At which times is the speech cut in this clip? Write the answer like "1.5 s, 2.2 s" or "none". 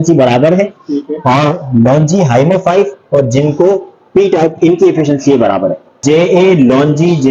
6.0 s